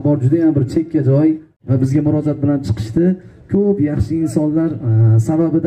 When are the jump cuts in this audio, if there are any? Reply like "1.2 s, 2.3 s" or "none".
1.5 s